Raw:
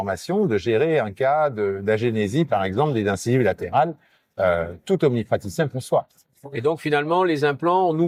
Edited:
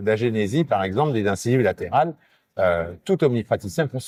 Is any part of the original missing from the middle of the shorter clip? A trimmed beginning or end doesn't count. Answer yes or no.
no